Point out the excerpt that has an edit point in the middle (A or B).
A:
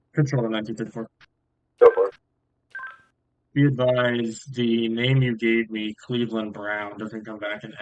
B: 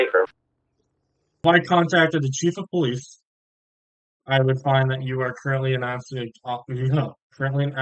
B